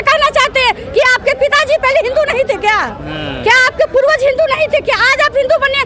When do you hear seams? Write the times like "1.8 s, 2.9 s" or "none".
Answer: none